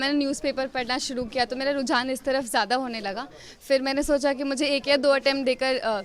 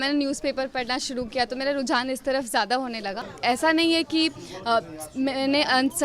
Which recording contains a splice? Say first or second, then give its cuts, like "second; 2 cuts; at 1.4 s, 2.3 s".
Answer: second; 1 cut; at 3.3 s